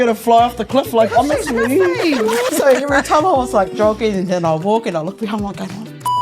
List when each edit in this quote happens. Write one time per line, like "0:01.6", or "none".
0:02.5